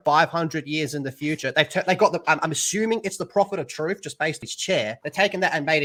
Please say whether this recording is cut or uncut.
uncut